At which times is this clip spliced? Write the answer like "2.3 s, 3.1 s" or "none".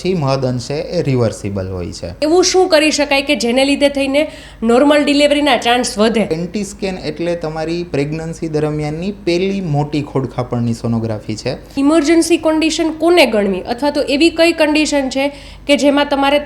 2.2 s, 6.3 s, 11.7 s